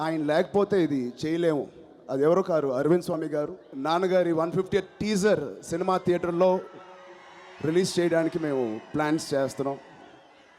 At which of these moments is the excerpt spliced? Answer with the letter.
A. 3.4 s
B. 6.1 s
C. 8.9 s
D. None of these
A